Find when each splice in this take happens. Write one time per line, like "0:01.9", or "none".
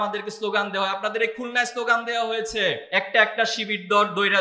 0:02.8